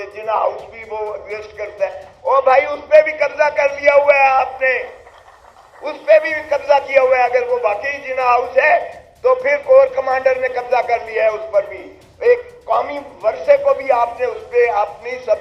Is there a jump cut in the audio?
no; 0 cuts

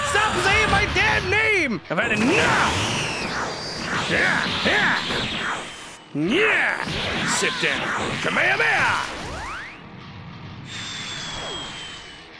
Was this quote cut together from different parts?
no; 0 cuts

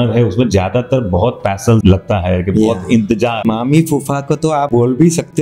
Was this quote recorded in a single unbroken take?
no; 3 cuts; at 1.8 s, 3.4 s, 4.7 s

